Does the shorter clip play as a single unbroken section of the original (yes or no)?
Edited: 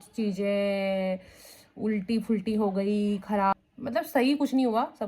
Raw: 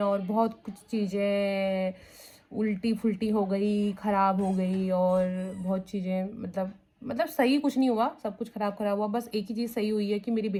no